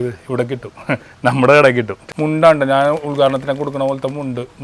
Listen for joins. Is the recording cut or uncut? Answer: cut